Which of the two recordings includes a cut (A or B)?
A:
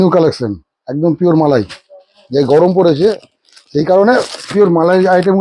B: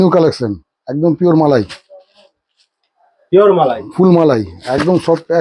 A